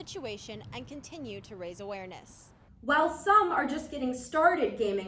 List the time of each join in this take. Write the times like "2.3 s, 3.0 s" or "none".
2.6 s